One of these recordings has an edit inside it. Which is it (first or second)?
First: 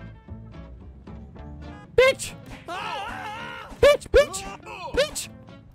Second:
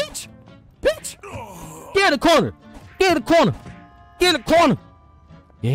first